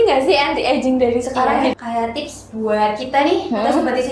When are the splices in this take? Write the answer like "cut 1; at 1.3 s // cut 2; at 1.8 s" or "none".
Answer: cut 1; at 1.7 s